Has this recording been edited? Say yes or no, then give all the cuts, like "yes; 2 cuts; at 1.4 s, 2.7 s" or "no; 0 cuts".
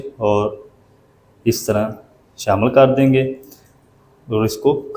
no; 0 cuts